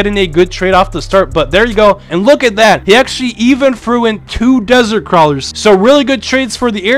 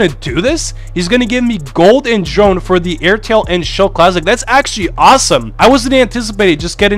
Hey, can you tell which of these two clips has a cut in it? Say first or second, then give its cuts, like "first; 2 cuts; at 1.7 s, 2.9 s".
first; 2 cuts; at 2.1 s, 5.5 s